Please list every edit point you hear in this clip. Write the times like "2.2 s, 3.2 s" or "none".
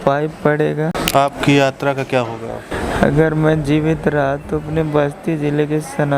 1.0 s, 2.7 s